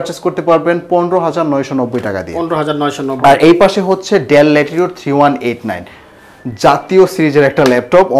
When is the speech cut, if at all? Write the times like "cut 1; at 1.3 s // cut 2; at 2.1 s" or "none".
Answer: none